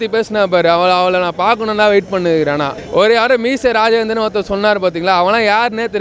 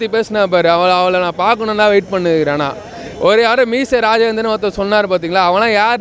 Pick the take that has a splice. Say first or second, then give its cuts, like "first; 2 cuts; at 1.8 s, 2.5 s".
first; 1 cut; at 2.8 s